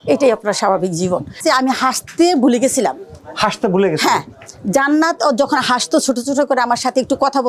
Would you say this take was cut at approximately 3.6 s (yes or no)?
no